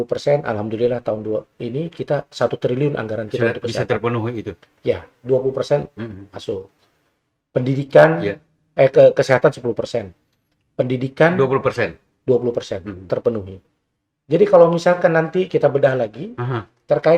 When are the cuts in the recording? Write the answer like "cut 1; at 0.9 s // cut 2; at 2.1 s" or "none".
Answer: none